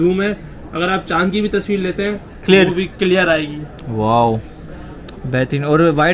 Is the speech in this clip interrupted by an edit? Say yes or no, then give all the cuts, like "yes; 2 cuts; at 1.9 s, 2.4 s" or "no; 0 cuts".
no; 0 cuts